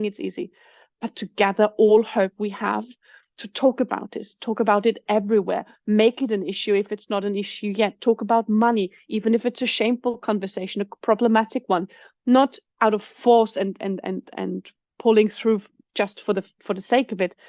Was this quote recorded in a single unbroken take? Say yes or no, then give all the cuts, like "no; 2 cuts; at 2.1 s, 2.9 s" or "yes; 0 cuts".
yes; 0 cuts